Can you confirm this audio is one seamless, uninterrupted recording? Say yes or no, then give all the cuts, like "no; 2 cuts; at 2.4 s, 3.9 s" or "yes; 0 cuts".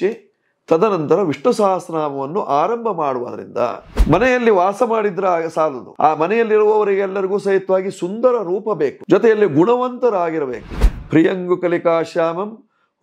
no; 2 cuts; at 3.9 s, 10.7 s